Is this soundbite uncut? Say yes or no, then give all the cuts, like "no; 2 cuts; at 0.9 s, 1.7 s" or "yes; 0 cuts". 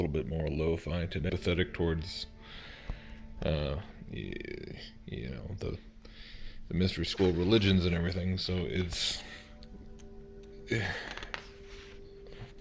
yes; 0 cuts